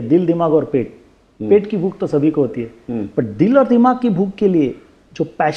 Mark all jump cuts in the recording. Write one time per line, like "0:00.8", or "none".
none

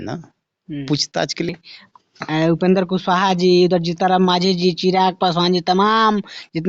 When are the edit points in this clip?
0:01.5

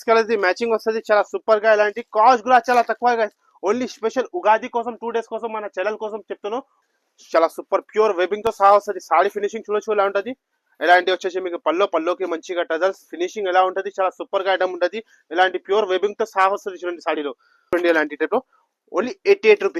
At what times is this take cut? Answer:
0:06.8
0:17.7

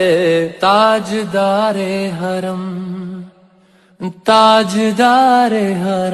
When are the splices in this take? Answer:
0:04.4

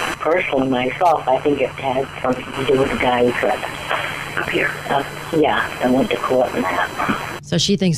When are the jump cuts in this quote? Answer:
none

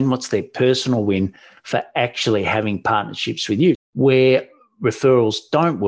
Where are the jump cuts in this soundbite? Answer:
0:03.8

